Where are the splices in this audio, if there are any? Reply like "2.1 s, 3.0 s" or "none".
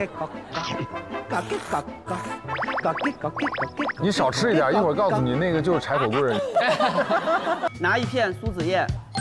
7.7 s